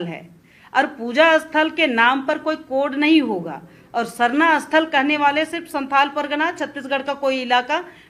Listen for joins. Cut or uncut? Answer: uncut